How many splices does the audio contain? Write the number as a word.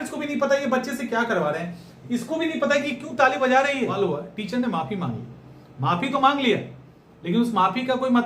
one